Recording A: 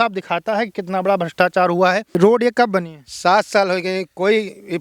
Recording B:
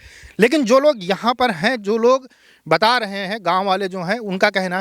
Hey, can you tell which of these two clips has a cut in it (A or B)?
A